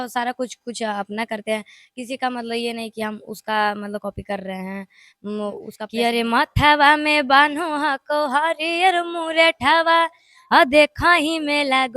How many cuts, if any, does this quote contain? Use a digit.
1